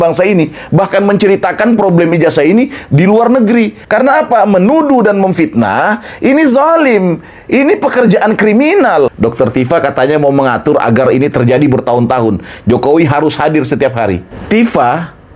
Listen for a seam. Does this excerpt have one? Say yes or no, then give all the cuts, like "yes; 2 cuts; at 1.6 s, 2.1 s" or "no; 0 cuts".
yes; 3 cuts; at 3.8 s, 9.1 s, 14.3 s